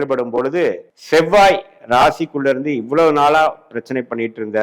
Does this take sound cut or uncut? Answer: cut